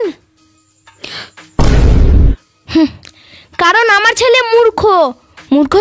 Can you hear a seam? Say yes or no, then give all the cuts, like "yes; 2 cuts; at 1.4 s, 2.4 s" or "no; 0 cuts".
no; 0 cuts